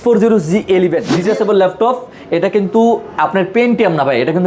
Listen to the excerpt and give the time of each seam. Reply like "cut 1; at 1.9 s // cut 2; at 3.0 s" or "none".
cut 1; at 1.1 s